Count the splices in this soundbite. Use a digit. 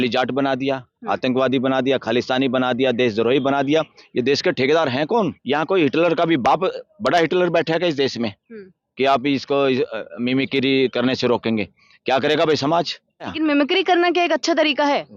2